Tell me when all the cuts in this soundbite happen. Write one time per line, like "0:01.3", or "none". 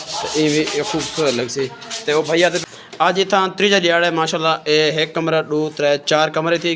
0:02.6